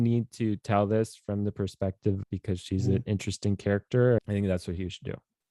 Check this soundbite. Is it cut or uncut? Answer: cut